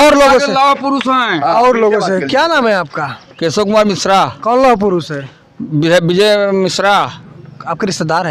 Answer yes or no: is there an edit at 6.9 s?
no